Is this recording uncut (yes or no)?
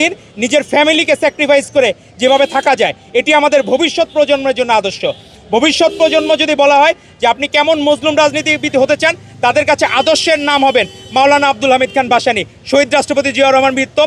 yes